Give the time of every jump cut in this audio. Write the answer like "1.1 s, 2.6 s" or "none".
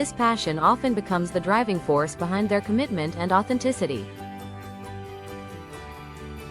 4.0 s